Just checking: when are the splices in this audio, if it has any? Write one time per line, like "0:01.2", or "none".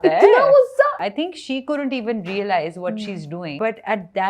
0:00.9
0:03.5